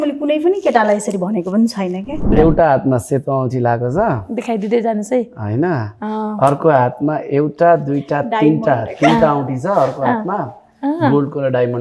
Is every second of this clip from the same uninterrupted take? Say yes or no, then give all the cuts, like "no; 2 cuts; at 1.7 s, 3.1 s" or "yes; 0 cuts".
no; 1 cut; at 2.2 s